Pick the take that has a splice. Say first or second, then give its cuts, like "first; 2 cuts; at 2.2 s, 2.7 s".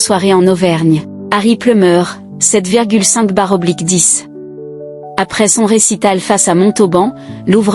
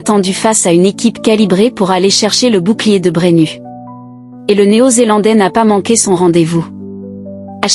first; 1 cut; at 1.2 s